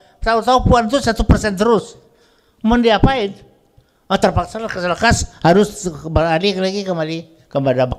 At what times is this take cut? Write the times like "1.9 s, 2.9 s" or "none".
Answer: none